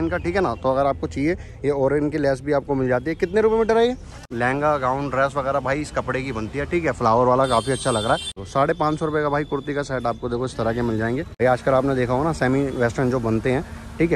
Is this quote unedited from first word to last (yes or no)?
no